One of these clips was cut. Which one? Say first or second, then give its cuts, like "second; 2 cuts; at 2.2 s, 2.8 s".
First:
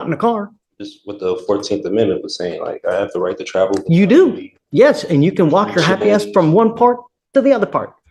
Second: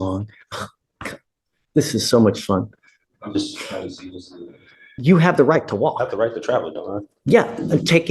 second; 1 cut; at 4.8 s